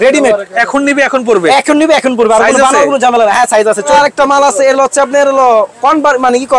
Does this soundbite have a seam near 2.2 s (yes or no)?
no